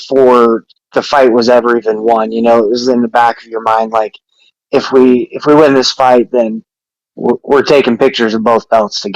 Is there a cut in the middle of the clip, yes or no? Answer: no